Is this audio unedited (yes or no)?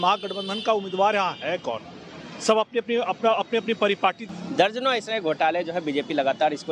no